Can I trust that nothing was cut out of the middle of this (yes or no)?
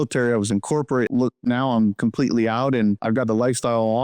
no